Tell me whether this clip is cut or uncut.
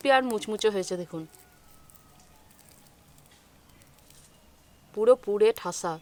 uncut